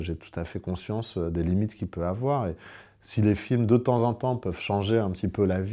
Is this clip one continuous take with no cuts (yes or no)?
yes